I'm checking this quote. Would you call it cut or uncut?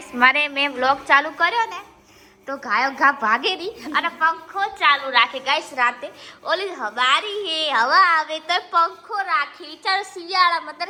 uncut